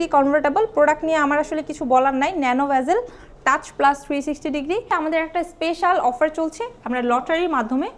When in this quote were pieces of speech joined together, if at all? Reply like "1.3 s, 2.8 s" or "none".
4.9 s